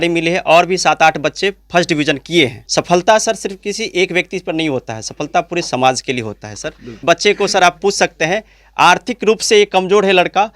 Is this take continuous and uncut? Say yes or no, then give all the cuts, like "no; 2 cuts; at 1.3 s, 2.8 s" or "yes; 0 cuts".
no; 2 cuts; at 2.6 s, 6.9 s